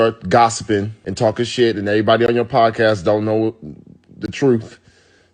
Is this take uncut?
no; 1 cut; at 1.0 s

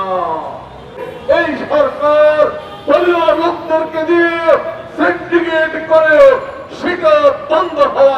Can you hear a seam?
yes; 1 cut; at 1.0 s

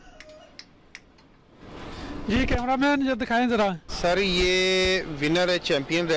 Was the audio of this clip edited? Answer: yes; 1 cut; at 3.9 s

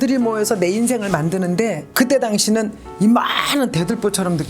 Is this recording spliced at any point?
yes; 1 cut; at 1.9 s

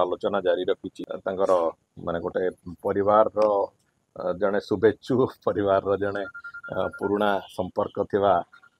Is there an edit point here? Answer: yes; 1 cut; at 1.0 s

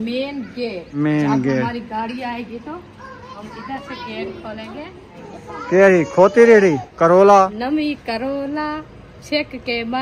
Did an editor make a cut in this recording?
yes; 4 cuts; at 0.9 s, 3.3 s, 5.2 s, 6.9 s

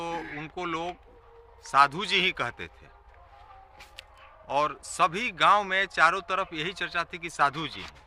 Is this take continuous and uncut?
yes; 0 cuts

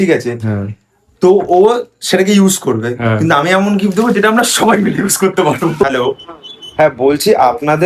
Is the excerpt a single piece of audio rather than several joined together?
no; 1 cut; at 5.8 s

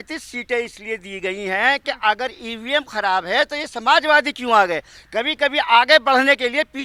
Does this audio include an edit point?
no; 0 cuts

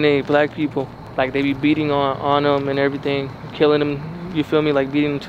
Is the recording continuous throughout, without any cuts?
yes; 0 cuts

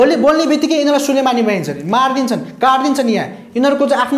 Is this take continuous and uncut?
yes; 0 cuts

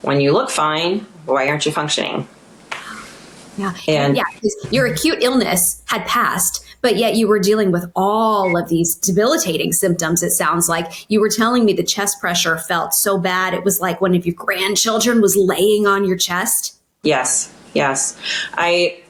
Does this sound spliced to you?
no; 0 cuts

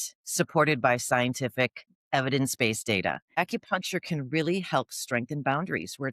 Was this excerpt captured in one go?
no; 1 cut; at 3.4 s

